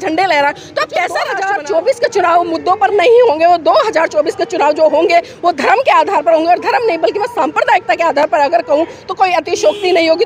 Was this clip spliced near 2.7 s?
no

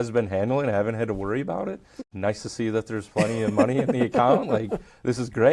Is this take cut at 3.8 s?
no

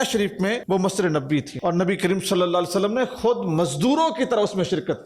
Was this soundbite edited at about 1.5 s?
yes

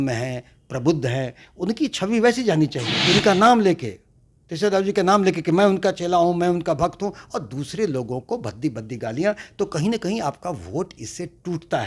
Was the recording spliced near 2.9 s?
yes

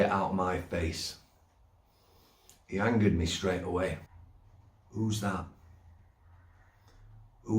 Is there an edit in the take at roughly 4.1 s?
yes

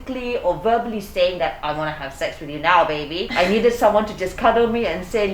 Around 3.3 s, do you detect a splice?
yes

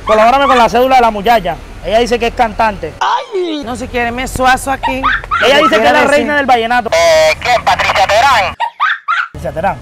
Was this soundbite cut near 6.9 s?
yes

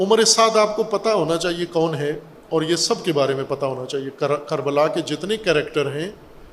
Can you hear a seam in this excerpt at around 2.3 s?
yes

